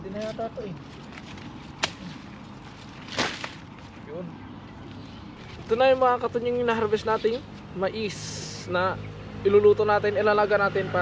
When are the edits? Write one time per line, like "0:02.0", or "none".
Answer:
0:05.4